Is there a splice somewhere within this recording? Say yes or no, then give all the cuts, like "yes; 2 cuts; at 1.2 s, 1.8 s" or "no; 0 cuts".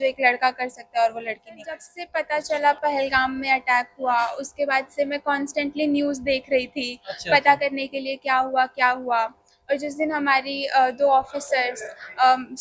yes; 1 cut; at 2.1 s